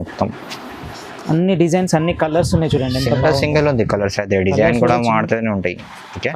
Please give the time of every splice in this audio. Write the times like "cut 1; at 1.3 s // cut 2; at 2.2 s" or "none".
none